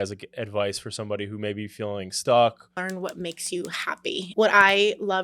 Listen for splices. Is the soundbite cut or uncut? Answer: cut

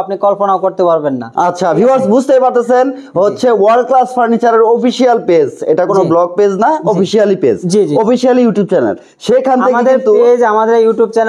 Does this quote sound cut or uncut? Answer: uncut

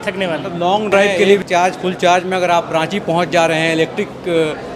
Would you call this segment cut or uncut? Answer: cut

